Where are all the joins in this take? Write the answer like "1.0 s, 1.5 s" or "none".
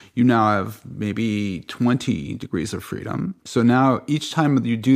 3.4 s